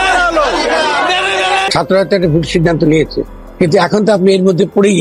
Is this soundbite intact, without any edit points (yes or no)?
no